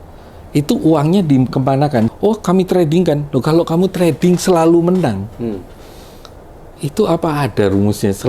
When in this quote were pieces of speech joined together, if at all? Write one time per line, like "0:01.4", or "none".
0:02.1